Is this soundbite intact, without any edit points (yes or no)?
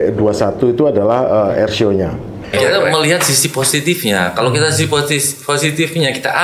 no